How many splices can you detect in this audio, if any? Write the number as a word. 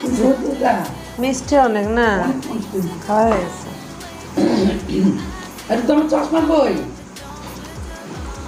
zero